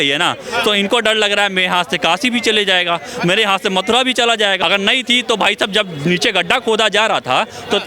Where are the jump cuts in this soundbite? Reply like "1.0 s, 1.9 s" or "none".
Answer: 4.6 s